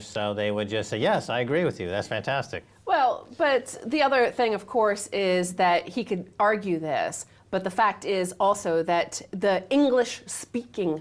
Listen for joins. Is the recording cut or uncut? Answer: cut